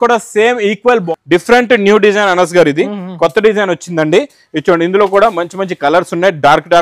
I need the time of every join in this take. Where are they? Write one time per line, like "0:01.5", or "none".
0:01.1